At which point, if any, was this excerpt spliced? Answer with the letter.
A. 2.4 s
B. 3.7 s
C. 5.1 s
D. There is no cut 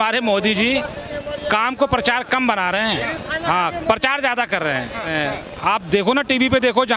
C